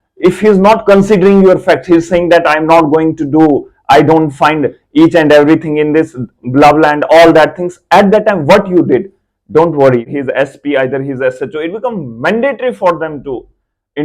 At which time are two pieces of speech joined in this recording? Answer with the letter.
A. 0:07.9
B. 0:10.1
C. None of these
B